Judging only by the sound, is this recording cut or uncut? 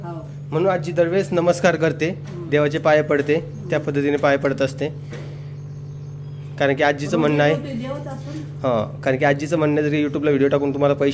uncut